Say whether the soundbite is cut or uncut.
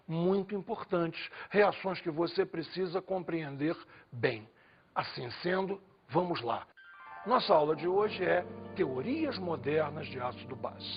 cut